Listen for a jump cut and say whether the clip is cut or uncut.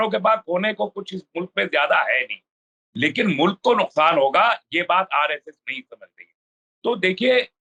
uncut